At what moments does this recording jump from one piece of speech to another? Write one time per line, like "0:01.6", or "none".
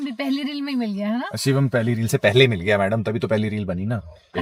none